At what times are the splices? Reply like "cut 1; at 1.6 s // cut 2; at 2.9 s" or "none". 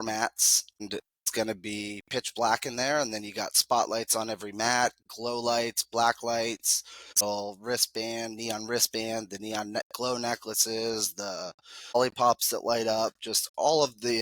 cut 1; at 1.2 s // cut 2; at 7.2 s // cut 3; at 12.0 s

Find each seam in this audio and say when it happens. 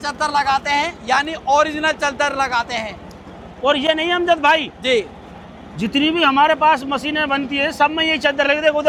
none

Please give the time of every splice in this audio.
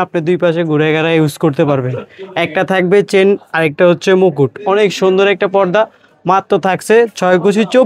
none

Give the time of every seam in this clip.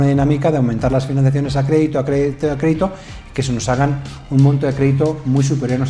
none

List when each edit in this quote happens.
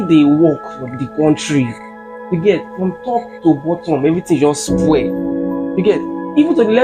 none

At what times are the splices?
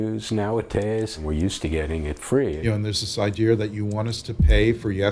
cut 1; at 1.2 s // cut 2; at 2.6 s

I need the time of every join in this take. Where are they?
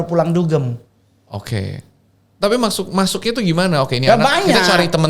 none

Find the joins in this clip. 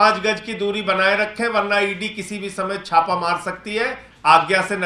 none

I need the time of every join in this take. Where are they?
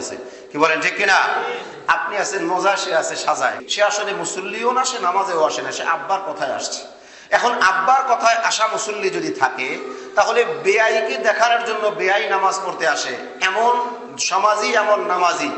cut 1; at 3.6 s

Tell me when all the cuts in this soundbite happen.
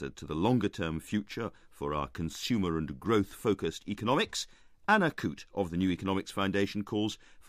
cut 1; at 6.4 s

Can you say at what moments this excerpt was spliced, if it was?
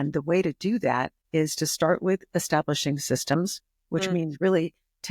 cut 1; at 1.2 s

